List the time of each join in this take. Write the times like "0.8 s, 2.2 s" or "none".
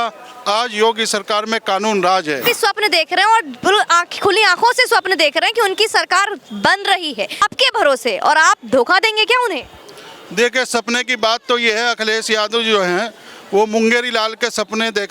2.4 s, 7.5 s